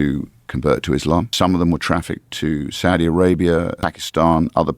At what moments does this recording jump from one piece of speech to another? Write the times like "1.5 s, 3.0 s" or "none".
1.3 s, 3.8 s